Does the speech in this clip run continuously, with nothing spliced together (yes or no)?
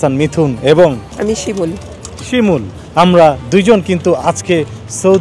yes